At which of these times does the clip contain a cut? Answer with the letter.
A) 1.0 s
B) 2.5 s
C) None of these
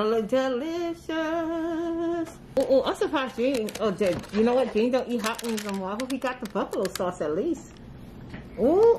B